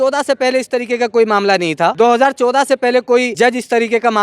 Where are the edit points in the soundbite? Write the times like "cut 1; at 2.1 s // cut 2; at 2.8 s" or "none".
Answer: cut 1; at 1.9 s // cut 2; at 3.3 s